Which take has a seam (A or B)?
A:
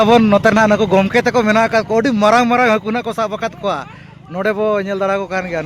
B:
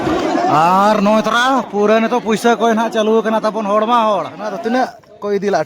B